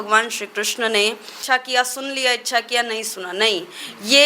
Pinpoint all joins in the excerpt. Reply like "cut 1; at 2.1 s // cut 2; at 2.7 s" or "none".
cut 1; at 1.4 s